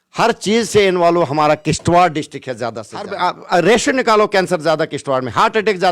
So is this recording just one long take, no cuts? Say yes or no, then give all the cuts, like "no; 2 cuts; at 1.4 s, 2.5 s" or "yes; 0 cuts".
no; 1 cut; at 3.1 s